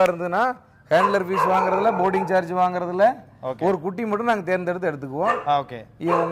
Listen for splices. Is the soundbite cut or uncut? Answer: uncut